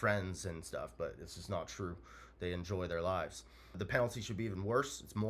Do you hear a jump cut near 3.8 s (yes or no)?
yes